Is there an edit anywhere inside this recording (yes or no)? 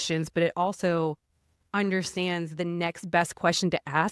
no